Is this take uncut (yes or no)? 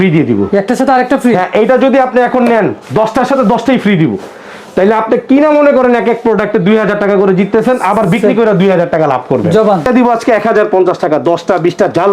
no